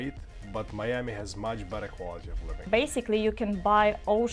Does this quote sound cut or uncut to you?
cut